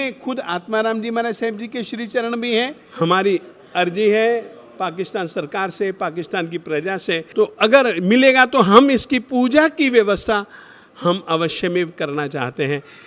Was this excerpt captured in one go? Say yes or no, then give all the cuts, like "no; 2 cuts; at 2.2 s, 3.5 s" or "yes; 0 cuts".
no; 2 cuts; at 2.8 s, 7.3 s